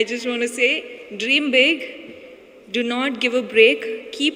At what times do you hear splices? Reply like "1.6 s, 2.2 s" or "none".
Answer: none